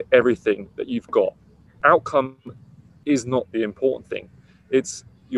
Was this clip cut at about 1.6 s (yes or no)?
yes